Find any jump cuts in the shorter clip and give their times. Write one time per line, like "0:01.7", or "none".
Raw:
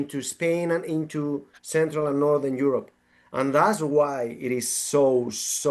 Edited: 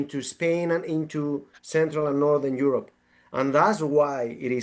none